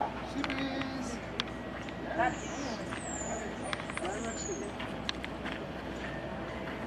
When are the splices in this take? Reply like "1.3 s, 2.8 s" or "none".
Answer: none